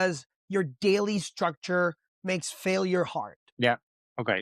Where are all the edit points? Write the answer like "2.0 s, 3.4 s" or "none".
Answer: 3.4 s